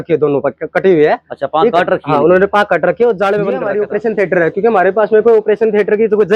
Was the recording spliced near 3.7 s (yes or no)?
yes